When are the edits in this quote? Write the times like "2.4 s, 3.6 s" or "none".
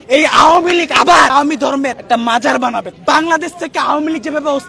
1.3 s, 3.0 s